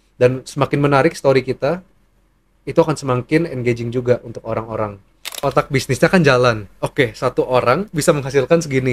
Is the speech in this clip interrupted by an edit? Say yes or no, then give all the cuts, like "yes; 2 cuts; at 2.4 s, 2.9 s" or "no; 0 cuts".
yes; 1 cut; at 5.4 s